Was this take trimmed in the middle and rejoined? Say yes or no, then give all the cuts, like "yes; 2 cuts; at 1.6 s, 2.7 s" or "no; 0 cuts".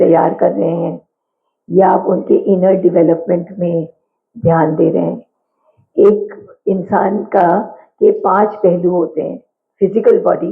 no; 0 cuts